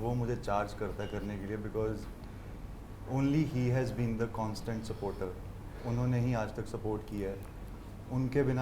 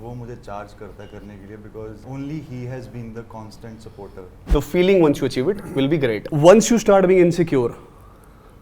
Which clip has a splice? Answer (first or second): second